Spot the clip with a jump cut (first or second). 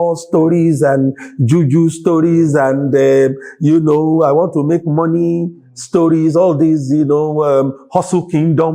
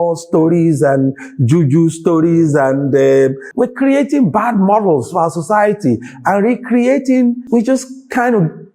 second